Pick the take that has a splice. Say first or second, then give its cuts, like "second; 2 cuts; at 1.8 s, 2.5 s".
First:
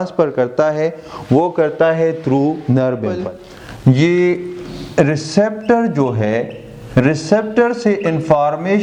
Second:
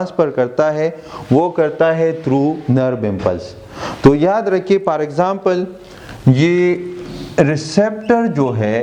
first; 1 cut; at 3.2 s